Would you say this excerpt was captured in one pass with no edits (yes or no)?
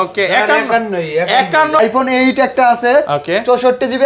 no